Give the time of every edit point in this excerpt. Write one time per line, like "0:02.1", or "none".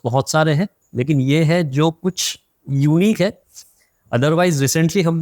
none